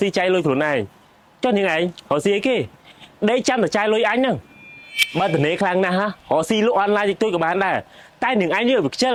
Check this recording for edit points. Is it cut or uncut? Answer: uncut